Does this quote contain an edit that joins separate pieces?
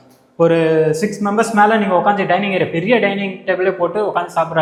no; 0 cuts

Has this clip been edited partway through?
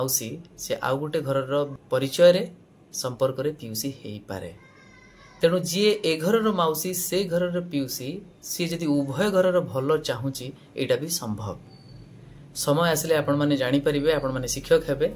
yes; 1 cut; at 1.8 s

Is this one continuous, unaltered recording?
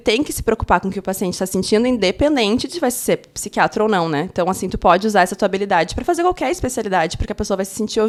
yes; 0 cuts

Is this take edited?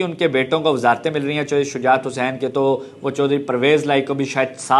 no; 0 cuts

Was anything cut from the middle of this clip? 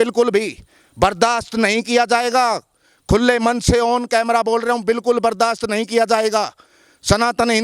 no; 0 cuts

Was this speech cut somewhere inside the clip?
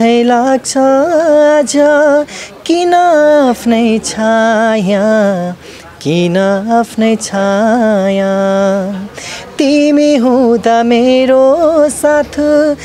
no; 0 cuts

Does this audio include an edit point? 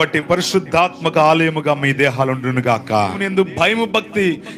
yes; 1 cut; at 3.2 s

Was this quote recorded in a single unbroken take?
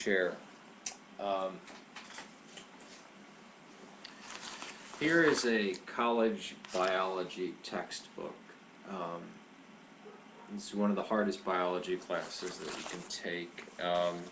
yes; 0 cuts

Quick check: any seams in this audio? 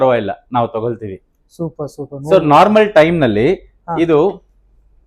no; 0 cuts

